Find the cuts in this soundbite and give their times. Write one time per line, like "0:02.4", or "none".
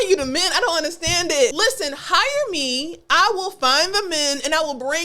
0:01.5